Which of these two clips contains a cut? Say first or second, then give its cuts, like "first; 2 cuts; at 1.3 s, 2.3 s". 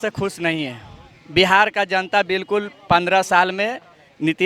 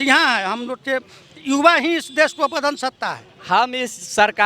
second; 1 cut; at 3.3 s